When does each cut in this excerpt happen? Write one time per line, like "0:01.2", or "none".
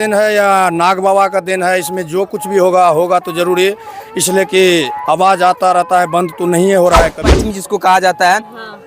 0:07.2